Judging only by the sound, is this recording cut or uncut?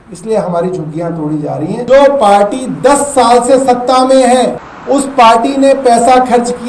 cut